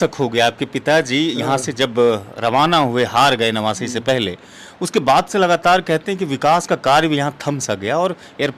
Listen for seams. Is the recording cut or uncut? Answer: uncut